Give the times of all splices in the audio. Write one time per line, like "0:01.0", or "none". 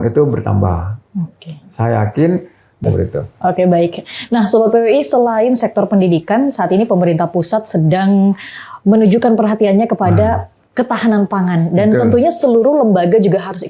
0:02.8